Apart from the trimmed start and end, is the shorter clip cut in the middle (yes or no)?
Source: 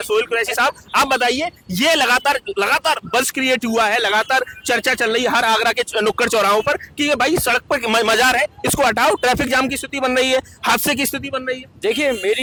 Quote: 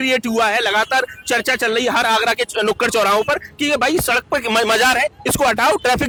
no